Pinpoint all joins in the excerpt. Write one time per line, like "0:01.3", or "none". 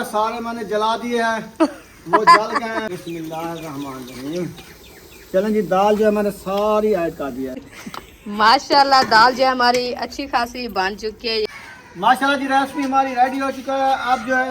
0:02.9
0:07.6
0:11.5